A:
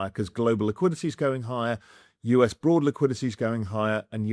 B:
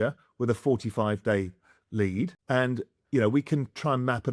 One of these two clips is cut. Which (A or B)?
B